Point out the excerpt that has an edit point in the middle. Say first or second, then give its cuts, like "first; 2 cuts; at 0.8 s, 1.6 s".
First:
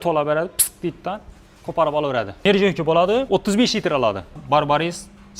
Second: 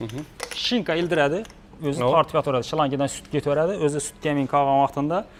first; 3 cuts; at 2.4 s, 3.3 s, 4.4 s